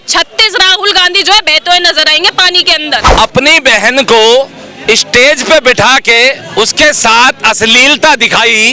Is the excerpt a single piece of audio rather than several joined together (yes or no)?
no